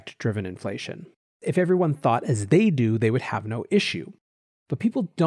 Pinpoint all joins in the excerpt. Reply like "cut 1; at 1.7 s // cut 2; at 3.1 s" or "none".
cut 1; at 1.4 s